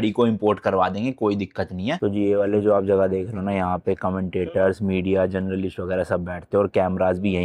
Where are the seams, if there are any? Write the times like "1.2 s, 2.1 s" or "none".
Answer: 2.0 s